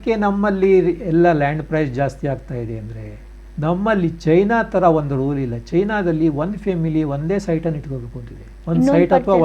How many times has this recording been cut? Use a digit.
0